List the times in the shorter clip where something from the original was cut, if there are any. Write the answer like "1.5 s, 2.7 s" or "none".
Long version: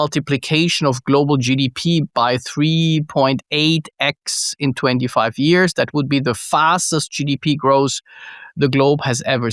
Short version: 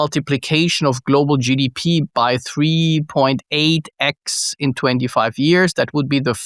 none